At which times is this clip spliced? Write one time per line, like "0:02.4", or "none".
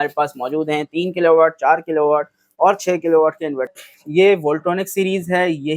0:03.7